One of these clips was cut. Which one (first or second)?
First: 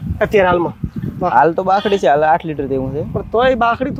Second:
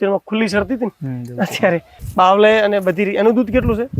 second